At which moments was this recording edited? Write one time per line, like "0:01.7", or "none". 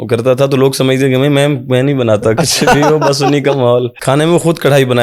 0:03.9